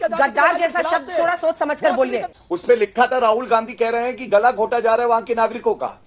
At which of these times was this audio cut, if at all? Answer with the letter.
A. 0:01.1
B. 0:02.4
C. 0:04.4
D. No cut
B